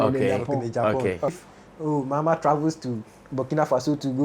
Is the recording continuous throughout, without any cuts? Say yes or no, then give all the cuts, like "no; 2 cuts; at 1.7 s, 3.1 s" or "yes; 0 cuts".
no; 1 cut; at 1.3 s